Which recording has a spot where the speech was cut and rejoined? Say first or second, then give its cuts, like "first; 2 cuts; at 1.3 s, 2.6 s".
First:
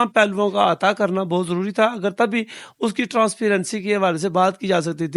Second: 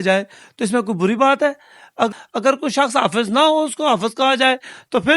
second; 1 cut; at 2.1 s